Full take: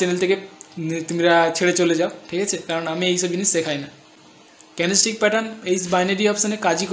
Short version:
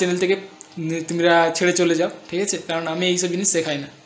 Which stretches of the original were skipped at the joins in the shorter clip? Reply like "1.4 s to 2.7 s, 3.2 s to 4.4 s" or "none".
none